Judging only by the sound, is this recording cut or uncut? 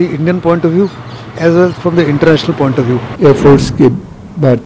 cut